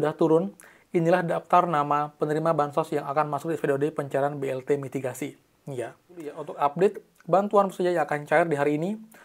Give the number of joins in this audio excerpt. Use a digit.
1